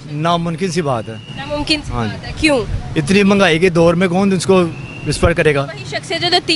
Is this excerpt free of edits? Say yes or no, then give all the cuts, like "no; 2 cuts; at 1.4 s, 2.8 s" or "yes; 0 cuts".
yes; 0 cuts